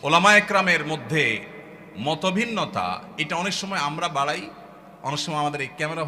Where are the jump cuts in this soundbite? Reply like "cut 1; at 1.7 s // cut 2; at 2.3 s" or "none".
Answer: none